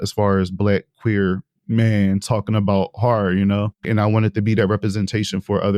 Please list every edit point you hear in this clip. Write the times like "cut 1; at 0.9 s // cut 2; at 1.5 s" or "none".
cut 1; at 3.9 s